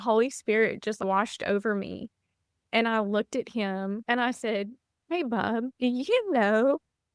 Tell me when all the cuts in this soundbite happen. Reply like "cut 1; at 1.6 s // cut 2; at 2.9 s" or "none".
cut 1; at 4.0 s // cut 2; at 5.7 s

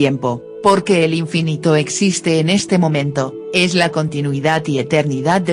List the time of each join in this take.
none

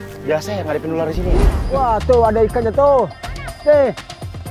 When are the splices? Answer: cut 1; at 1.6 s

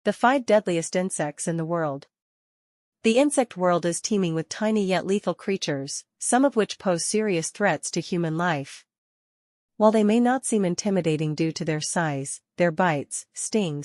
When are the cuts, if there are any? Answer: cut 1; at 1.1 s

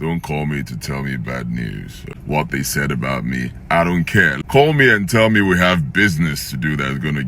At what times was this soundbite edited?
cut 1; at 2.1 s // cut 2; at 4.3 s

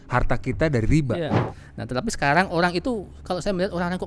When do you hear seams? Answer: cut 1; at 1.5 s

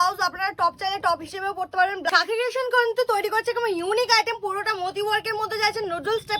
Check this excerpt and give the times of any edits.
cut 1; at 2.1 s

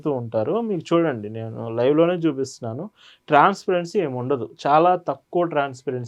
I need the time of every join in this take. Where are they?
none

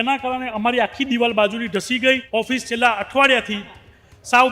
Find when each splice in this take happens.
cut 1; at 2.2 s

